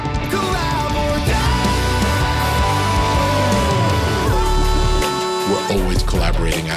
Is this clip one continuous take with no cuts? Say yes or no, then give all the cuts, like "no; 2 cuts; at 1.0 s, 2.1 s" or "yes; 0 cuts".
yes; 0 cuts